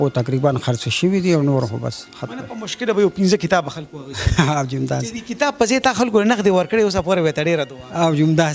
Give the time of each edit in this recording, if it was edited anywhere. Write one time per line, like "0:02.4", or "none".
none

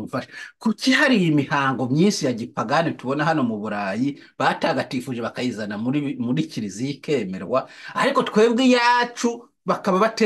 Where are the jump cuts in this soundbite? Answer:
none

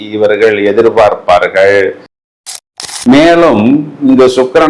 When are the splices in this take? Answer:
0:02.5

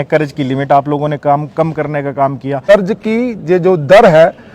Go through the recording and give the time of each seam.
0:02.6

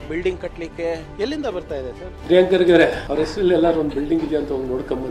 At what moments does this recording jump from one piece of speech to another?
0:01.1
0:02.1
0:03.0

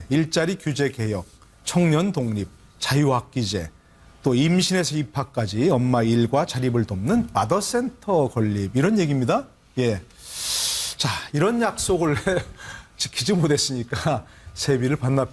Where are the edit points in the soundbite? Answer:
0:09.2

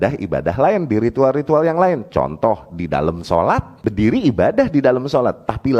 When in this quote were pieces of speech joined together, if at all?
0:03.8

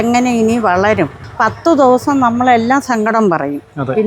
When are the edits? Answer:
0:01.2

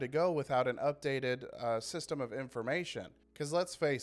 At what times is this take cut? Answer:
0:03.1

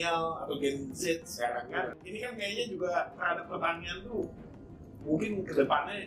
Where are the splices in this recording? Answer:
0:02.0

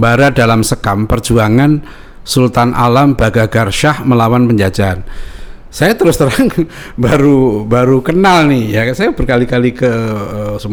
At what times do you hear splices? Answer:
none

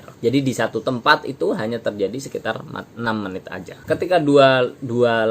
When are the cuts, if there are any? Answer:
0:03.8

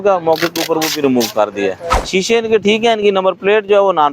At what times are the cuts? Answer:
0:01.9

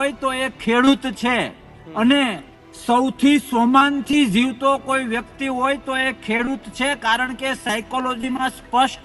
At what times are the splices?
none

